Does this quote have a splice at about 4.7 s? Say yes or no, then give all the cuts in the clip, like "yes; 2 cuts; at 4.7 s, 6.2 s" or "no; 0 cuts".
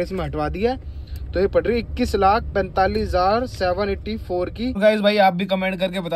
yes; 1 cut; at 4.7 s